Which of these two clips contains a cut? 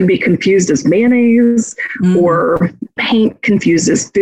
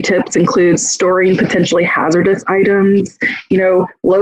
first; 1 cut; at 2.9 s

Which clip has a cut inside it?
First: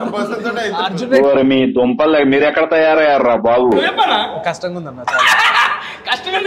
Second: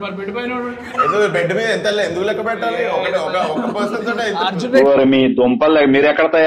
first; 1 cut; at 3.9 s

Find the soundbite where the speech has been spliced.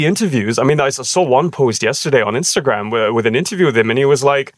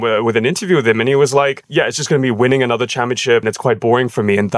second; 1 cut; at 3.4 s

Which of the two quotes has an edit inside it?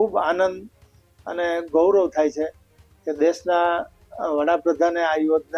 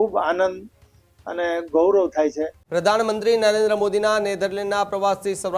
second; 1 cut; at 2.5 s

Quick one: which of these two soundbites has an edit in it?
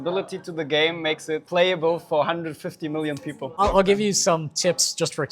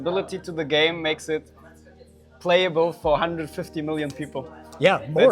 first; 2 cuts; at 1.5 s, 3.6 s

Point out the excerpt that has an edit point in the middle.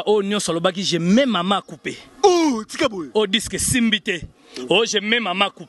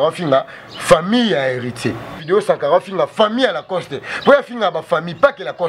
second; 1 cut; at 2.2 s

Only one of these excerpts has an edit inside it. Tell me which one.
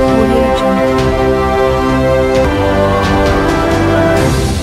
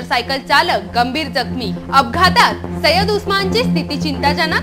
first; 1 cut; at 2.2 s

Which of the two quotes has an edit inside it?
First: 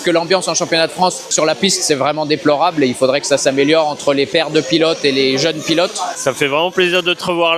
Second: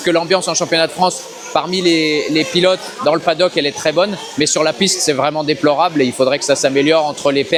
first; 2 cuts; at 1.3 s, 6.1 s

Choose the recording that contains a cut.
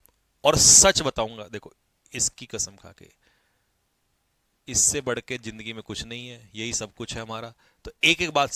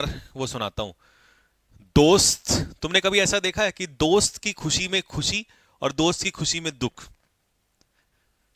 second; 1 cut; at 1.9 s

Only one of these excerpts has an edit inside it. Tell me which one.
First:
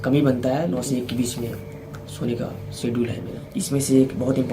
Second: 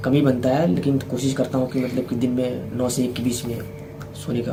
first; 2 cuts; at 0.8 s, 3.3 s

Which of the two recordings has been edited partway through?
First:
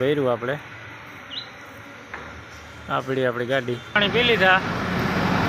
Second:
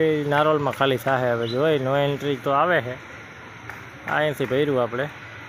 first; 1 cut; at 4.0 s

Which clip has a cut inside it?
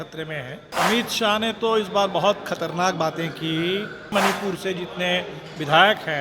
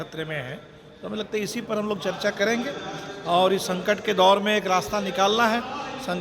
first; 2 cuts; at 0.7 s, 4.1 s

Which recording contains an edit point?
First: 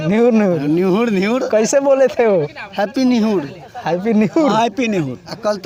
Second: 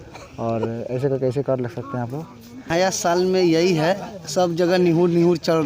second; 1 cut; at 2.7 s

